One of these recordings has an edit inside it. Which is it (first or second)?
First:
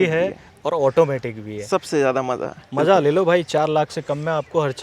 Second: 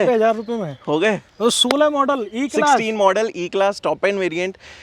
first